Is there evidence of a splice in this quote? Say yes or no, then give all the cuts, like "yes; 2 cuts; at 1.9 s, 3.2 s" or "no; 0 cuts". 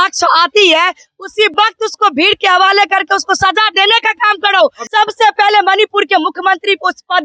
yes; 1 cut; at 4.8 s